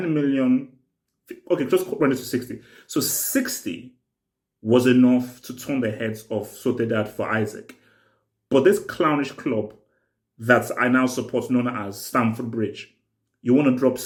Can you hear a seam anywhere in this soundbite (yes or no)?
no